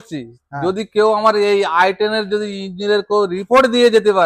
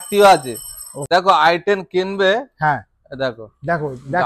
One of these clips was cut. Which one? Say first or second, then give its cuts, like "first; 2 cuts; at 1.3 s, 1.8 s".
second; 1 cut; at 0.9 s